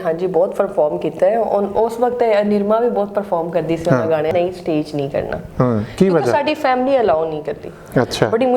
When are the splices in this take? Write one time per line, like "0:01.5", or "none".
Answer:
0:04.3